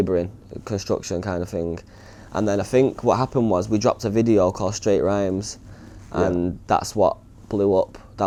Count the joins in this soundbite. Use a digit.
0